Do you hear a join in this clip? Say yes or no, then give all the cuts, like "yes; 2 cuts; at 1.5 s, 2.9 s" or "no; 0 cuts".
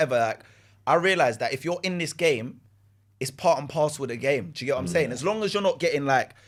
no; 0 cuts